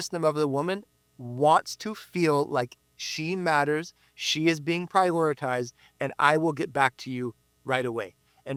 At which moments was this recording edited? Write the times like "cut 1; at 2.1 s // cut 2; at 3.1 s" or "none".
none